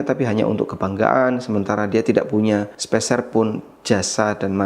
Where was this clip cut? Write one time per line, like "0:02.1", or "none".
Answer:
0:02.8